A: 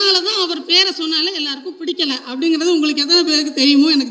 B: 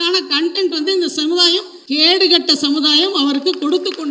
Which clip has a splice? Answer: B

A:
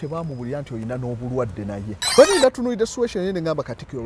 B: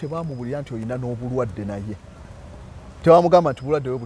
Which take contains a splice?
A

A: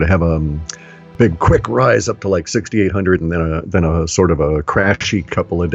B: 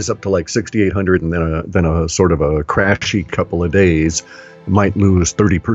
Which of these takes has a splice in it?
A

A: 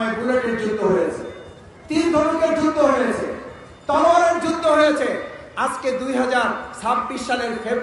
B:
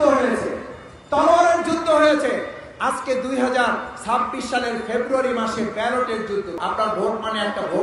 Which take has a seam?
B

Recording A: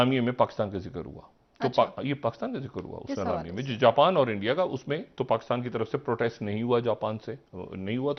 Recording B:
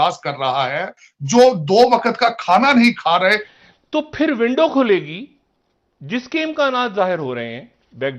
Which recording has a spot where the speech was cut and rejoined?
B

